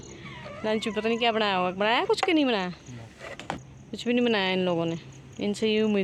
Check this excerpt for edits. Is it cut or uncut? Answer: uncut